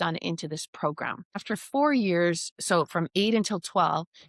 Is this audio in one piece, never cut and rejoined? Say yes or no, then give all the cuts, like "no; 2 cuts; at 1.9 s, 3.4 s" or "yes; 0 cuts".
no; 1 cut; at 1.4 s